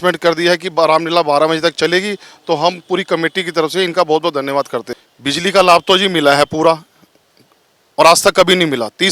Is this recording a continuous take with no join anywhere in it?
no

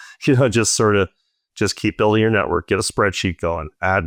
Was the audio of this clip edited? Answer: no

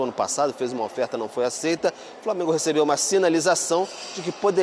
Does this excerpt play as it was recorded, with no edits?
yes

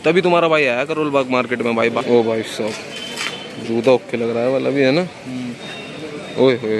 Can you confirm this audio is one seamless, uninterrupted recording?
no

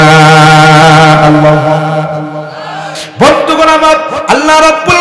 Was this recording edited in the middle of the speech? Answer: yes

